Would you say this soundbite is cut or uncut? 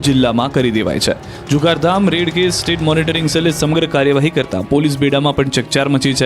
cut